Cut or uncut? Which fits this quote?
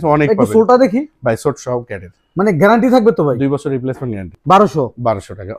cut